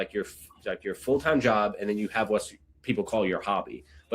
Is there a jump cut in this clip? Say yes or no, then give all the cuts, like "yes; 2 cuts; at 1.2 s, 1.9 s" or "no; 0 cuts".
no; 0 cuts